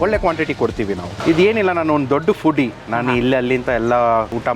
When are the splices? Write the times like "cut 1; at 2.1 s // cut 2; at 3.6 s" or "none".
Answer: cut 1; at 1.1 s